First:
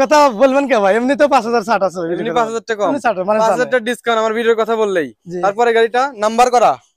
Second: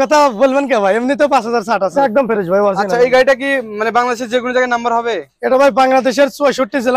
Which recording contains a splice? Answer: second; 1 cut; at 1.9 s

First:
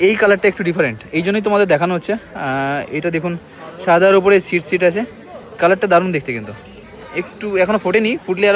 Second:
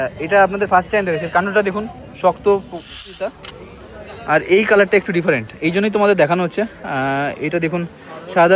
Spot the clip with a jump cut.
second; 1 cut; at 3.2 s

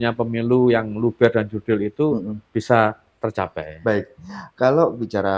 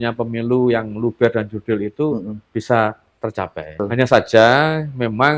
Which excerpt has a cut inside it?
second; 1 cut; at 3.8 s

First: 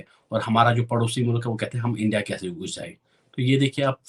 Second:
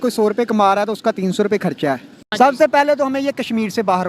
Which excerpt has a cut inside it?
second; 1 cut; at 2.2 s

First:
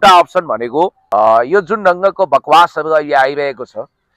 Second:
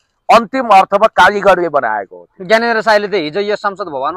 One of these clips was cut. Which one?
first; 1 cut; at 1.0 s

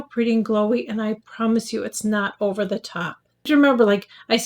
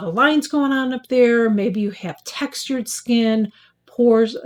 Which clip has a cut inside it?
first; 1 cut; at 3.5 s

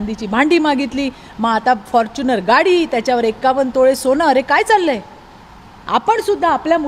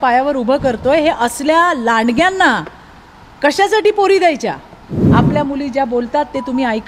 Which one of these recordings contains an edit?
second; 1 cut; at 5.0 s

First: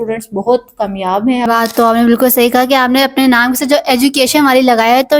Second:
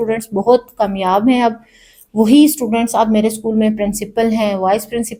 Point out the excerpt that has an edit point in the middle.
first; 1 cut; at 1.4 s

